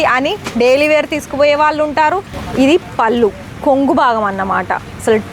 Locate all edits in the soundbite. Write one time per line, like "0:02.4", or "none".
0:02.4